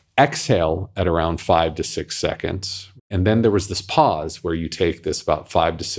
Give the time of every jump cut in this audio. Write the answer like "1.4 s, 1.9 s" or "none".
3.0 s